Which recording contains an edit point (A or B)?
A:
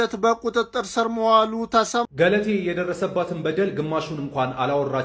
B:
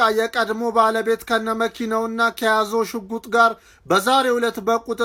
A